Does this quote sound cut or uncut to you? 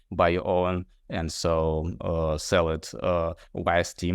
uncut